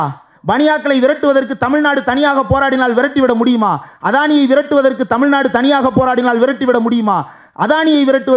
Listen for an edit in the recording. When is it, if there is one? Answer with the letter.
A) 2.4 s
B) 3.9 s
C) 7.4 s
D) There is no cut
D